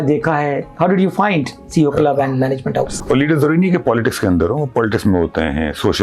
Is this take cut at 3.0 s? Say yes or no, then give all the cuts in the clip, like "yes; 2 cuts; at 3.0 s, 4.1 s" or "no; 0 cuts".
yes; 1 cut; at 3.0 s